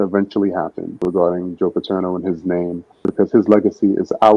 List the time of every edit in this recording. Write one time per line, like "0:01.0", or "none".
0:01.0
0:03.1